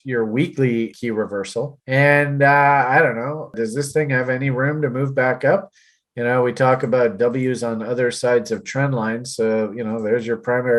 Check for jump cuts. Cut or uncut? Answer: cut